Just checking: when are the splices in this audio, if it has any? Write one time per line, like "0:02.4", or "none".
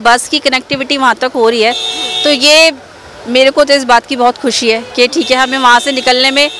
none